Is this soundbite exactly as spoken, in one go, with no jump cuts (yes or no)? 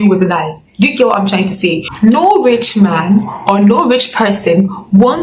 no